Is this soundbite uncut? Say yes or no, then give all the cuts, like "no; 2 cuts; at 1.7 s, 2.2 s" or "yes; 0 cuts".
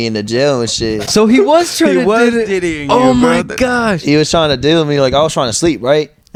yes; 0 cuts